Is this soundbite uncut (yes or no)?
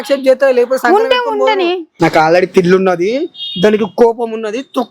no